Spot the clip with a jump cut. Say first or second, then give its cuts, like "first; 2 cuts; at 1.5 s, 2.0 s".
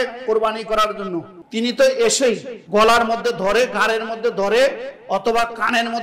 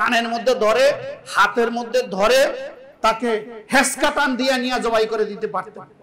first; 2 cuts; at 1.4 s, 2.5 s